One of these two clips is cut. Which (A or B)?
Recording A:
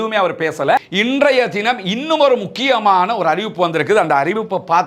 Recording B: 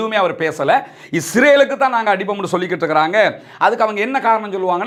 A